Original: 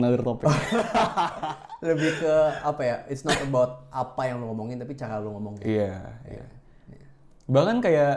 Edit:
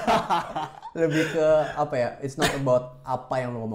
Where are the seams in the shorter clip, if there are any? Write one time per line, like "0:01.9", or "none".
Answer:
none